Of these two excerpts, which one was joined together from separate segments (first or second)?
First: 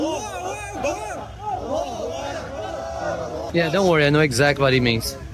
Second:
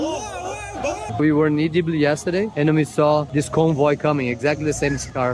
second